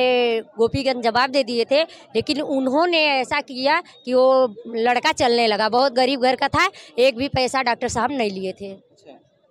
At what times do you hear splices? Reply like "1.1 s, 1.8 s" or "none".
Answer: none

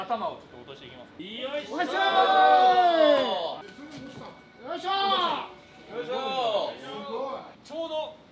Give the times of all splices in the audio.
none

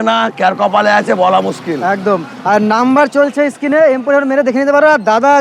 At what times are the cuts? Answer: none

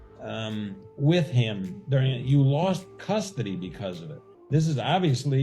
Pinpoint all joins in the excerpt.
4.3 s

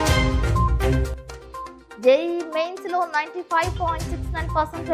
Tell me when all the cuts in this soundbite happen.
1.2 s

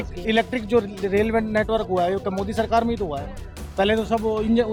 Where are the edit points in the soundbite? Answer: none

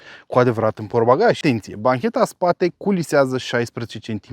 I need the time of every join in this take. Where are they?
1.4 s

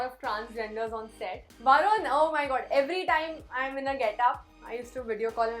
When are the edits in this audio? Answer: 1.5 s

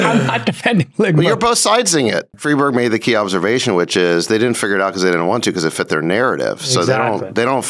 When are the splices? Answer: 2.3 s

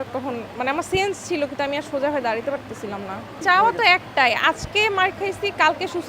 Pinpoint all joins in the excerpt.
3.3 s

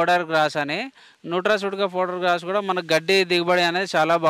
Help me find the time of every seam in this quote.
none

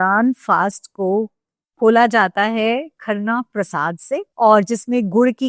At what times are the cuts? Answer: none

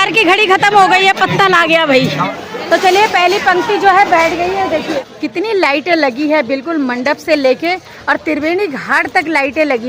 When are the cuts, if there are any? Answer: 2.3 s, 5.1 s

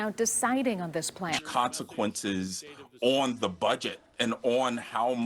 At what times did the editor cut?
1.4 s

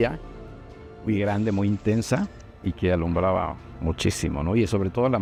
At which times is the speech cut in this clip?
none

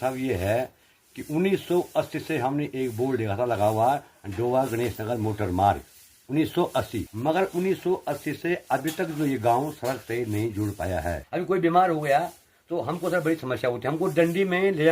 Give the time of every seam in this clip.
7.0 s, 11.2 s

